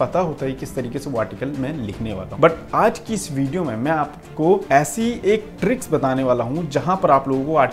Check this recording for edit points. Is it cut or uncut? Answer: cut